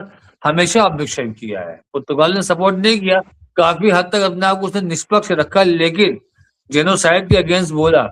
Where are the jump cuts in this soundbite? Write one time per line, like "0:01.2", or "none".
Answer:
none